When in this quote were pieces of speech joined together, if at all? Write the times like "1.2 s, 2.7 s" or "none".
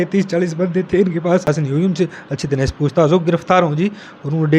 1.5 s